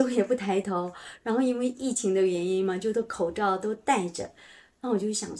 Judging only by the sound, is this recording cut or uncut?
uncut